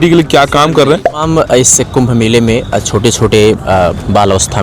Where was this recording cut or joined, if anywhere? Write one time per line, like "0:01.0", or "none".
0:01.2